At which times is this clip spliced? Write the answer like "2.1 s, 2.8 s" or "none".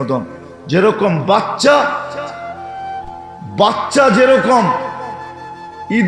2.3 s, 3.5 s

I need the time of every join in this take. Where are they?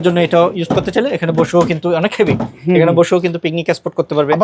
none

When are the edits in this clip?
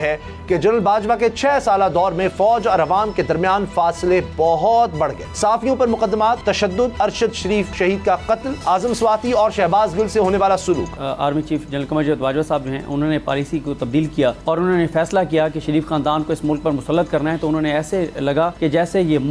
5.2 s, 6.7 s, 7.7 s, 8.5 s, 11.0 s, 14.4 s, 18.5 s

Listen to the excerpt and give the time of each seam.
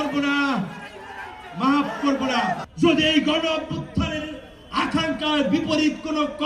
2.7 s

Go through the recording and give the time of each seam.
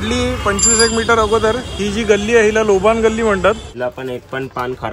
3.7 s

